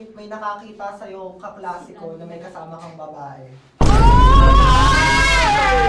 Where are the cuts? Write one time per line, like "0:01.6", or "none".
none